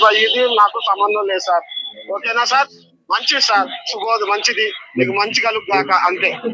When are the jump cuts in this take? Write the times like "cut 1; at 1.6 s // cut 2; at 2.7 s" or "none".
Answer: none